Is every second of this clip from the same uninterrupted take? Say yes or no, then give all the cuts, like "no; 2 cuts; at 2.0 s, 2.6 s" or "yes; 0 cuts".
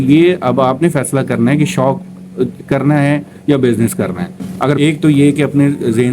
no; 1 cut; at 4.8 s